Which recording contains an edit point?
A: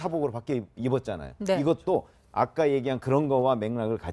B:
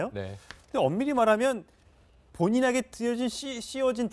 A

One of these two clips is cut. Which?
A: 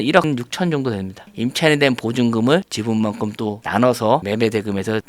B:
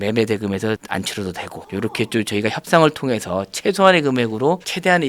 A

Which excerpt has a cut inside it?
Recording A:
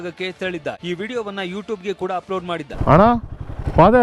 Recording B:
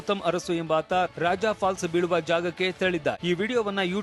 A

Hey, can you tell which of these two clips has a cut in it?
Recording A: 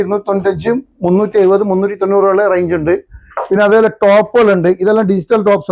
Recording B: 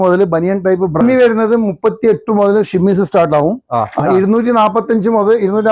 B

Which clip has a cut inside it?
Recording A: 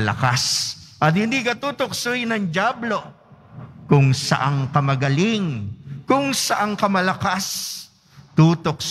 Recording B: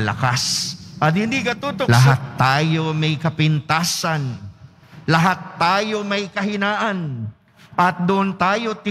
B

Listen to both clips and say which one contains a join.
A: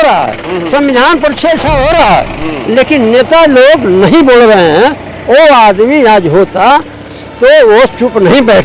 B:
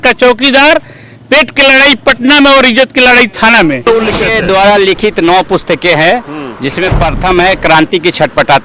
B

